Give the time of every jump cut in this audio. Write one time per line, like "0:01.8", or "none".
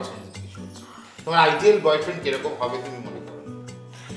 0:03.1